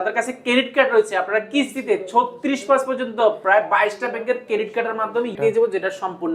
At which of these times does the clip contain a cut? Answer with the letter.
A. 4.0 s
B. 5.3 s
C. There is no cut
B